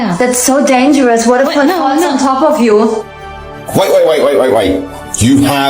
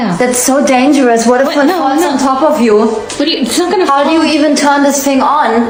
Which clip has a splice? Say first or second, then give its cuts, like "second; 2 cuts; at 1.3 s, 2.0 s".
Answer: first; 1 cut; at 3.2 s